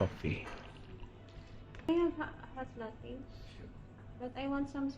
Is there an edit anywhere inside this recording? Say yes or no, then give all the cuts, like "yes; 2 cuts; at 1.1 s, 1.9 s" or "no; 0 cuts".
yes; 1 cut; at 1.9 s